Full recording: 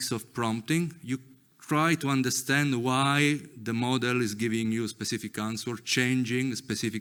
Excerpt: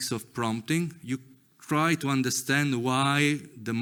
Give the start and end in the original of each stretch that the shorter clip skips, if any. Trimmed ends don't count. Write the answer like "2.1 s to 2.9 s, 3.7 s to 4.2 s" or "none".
none